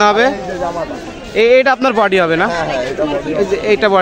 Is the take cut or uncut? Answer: uncut